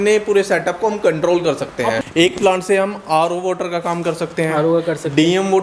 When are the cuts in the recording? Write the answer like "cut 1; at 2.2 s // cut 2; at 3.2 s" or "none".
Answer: cut 1; at 2.0 s